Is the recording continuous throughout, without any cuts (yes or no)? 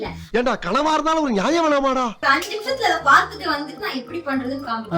no